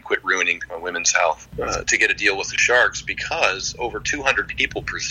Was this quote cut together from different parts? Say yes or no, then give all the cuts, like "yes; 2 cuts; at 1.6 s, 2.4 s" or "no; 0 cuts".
yes; 1 cut; at 1.5 s